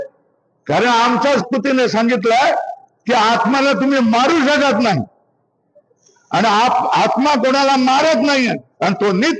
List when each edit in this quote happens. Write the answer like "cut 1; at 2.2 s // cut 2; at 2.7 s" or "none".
cut 1; at 1.4 s